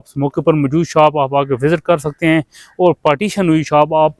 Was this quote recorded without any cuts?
yes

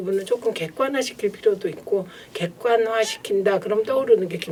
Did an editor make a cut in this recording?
no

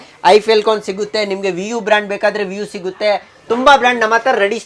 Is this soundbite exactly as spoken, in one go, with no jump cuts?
yes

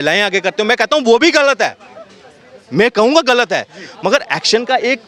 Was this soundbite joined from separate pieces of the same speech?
no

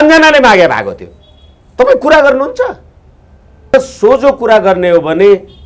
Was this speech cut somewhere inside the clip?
yes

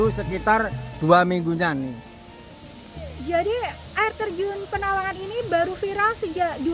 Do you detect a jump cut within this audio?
no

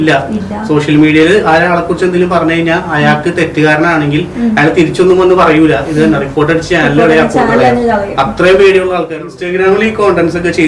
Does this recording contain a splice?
yes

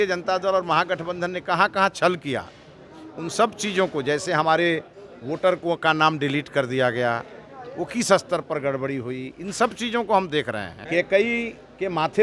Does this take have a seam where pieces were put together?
yes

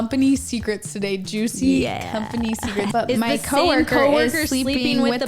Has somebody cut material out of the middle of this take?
yes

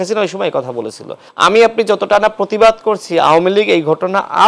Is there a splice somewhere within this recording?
yes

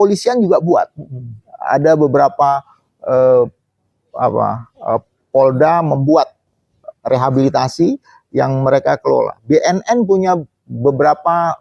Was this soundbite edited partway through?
no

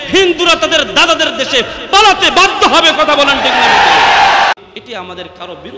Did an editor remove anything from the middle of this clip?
yes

